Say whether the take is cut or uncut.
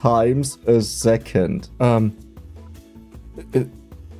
cut